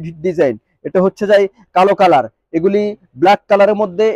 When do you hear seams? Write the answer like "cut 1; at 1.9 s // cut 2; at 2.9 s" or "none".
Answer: none